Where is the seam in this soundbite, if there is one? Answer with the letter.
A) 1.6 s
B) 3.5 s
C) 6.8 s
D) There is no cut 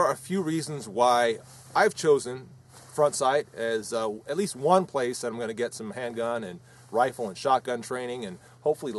D